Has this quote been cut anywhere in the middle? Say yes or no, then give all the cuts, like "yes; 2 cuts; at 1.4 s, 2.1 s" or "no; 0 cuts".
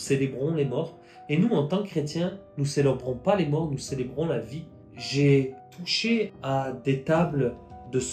yes; 2 cuts; at 4.8 s, 6.0 s